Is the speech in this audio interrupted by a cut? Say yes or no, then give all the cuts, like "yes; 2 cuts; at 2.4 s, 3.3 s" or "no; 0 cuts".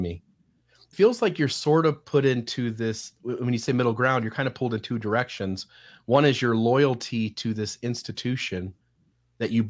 yes; 1 cut; at 0.9 s